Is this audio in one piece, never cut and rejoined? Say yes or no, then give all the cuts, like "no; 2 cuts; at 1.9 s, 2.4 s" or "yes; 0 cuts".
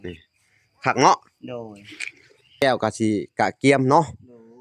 no; 1 cut; at 2.6 s